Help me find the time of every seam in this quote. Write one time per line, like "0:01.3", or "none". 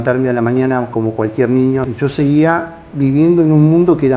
0:01.8